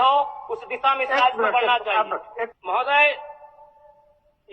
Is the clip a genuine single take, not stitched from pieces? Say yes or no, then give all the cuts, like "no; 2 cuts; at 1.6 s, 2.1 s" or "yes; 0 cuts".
no; 1 cut; at 2.6 s